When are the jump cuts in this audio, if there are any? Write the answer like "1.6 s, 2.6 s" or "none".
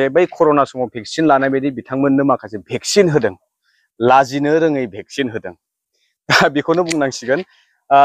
none